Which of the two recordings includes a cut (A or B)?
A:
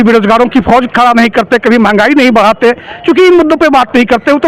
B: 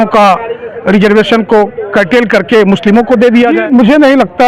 B